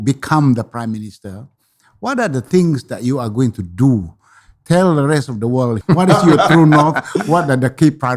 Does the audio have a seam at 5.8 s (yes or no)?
yes